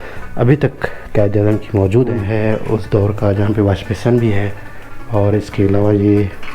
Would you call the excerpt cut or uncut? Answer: cut